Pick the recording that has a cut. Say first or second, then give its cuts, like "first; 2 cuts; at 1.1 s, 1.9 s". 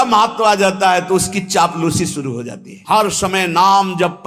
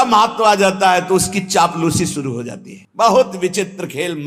first; 1 cut; at 2.7 s